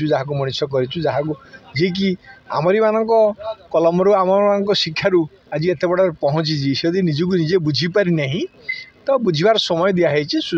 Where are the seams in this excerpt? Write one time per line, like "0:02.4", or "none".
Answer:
none